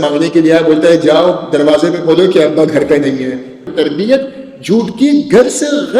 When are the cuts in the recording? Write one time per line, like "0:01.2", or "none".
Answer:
0:03.7